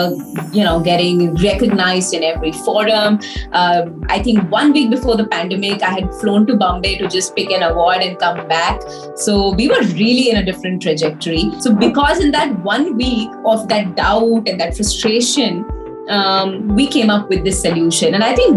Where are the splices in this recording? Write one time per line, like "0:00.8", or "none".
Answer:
0:11.5

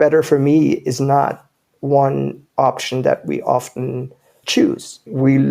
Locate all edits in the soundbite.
0:02.4

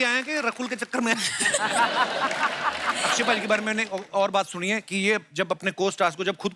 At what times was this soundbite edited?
0:02.9

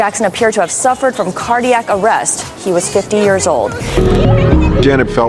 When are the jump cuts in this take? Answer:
0:03.8

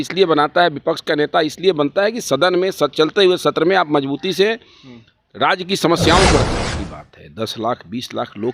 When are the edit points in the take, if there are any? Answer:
0:06.7

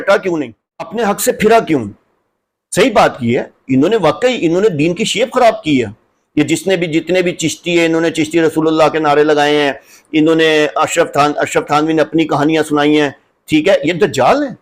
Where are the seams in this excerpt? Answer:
0:00.9

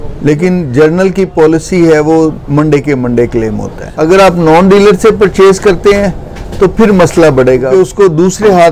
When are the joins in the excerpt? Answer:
0:03.9
0:07.7

